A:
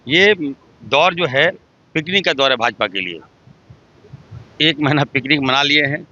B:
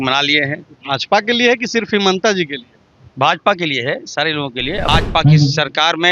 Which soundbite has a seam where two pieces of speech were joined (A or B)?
B